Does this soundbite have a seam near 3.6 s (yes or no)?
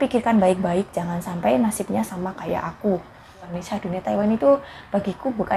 yes